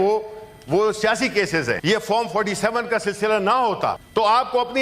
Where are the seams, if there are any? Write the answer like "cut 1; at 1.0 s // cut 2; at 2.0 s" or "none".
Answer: cut 1; at 1.8 s // cut 2; at 4.0 s